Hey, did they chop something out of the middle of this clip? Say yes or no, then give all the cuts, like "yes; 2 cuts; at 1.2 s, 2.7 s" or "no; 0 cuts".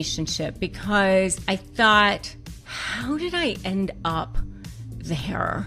yes; 1 cut; at 1.4 s